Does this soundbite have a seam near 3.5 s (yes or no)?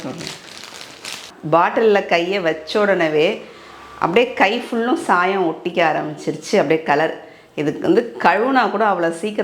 no